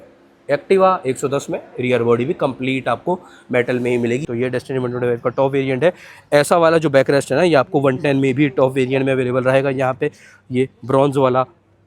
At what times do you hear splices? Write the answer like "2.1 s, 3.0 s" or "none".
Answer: 4.3 s